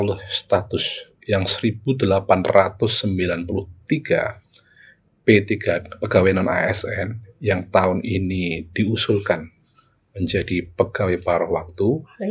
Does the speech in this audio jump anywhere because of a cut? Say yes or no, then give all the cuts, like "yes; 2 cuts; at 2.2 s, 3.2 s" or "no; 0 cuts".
no; 0 cuts